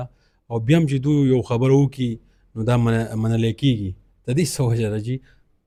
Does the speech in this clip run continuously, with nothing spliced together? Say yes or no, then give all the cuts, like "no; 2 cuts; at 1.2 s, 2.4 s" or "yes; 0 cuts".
yes; 0 cuts